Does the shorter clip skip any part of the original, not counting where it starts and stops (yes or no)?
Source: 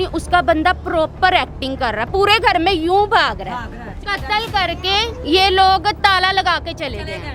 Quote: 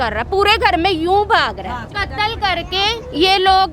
yes